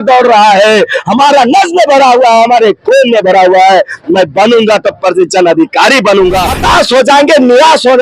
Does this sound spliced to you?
yes; 1 cut; at 6.5 s

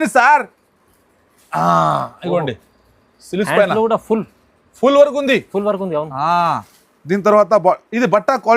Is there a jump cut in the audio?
no; 0 cuts

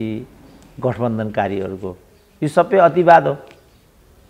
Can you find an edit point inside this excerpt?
no; 0 cuts

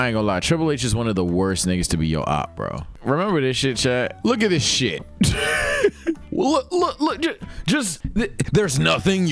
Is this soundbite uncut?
no; 1 cut; at 4.1 s

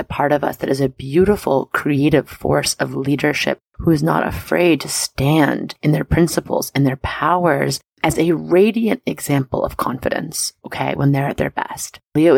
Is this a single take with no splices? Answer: yes; 0 cuts

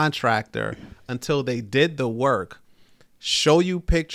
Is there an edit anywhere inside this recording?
no; 0 cuts

